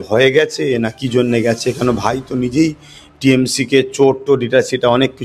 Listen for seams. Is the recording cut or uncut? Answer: uncut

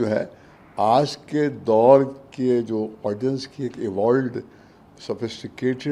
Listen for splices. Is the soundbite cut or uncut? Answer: uncut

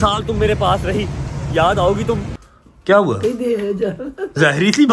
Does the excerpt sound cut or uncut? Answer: cut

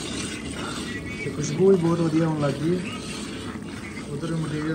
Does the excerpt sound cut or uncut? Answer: uncut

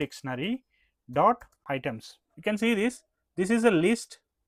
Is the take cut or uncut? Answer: uncut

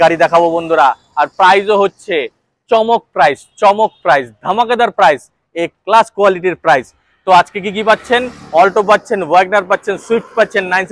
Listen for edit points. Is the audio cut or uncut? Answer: uncut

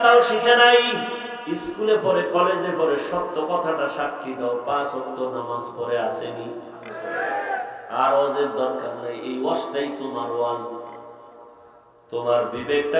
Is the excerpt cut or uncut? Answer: cut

